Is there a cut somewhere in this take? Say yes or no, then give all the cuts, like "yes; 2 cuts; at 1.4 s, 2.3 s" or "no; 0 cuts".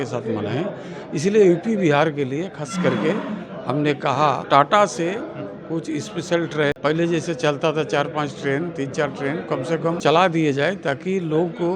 yes; 3 cuts; at 4.4 s, 6.8 s, 10.0 s